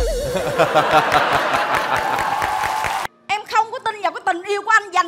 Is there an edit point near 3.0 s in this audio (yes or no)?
yes